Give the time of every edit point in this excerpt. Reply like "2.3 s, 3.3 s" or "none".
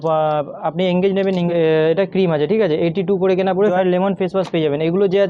1.5 s, 3.7 s